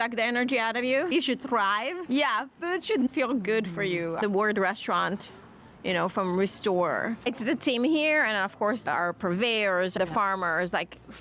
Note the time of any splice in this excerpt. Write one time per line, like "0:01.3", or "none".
0:02.0
0:03.1
0:07.2
0:08.8
0:09.9